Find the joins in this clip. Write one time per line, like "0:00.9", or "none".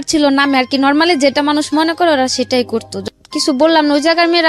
0:02.9